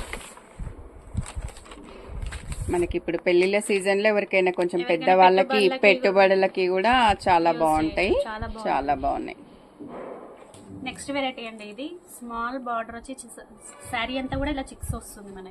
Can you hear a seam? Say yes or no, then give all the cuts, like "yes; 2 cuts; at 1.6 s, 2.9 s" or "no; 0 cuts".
no; 0 cuts